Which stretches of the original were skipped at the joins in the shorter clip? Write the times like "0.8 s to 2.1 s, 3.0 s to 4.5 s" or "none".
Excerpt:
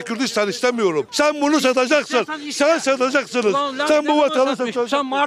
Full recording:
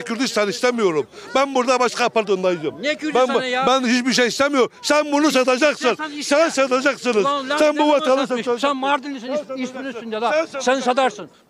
1.1 s to 4.8 s

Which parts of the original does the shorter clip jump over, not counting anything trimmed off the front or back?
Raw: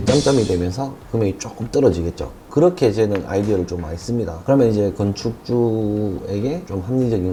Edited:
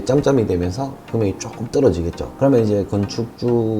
2.3 s to 4.3 s

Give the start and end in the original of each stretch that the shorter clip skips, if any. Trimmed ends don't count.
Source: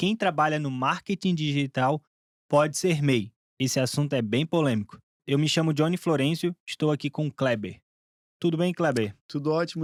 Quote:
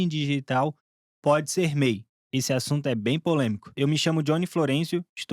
4.9 s to 5.2 s

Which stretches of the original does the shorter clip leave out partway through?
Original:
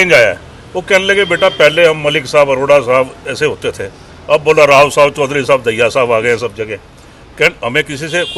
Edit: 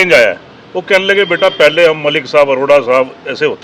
none

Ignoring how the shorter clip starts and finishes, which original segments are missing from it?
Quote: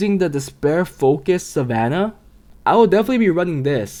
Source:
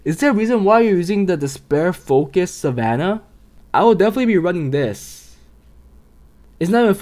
none

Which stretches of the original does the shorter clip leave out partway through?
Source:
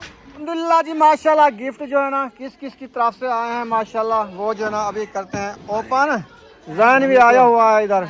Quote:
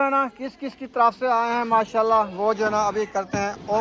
none

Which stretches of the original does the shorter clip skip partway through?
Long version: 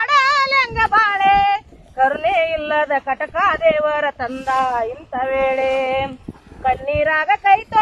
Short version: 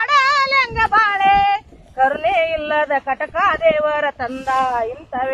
none

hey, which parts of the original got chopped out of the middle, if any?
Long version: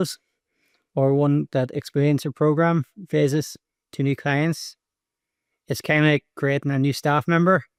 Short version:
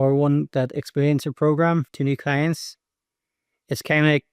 2.9 s to 3.9 s

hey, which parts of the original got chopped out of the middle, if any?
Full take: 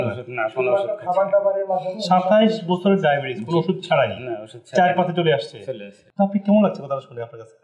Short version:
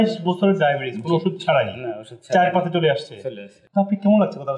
none

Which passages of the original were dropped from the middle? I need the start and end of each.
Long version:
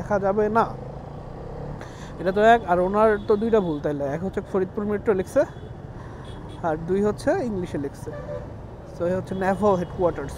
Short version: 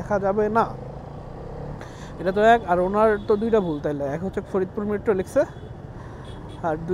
none

